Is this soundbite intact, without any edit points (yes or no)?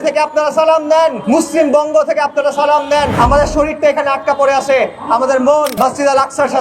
no